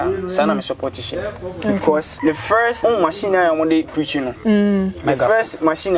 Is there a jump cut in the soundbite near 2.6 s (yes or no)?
yes